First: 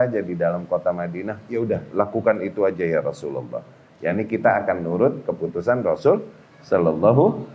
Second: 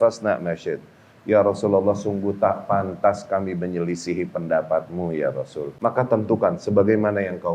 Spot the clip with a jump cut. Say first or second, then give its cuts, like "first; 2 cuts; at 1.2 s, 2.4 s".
second; 1 cut; at 5.6 s